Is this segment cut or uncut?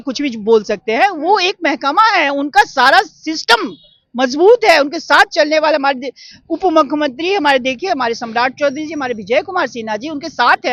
uncut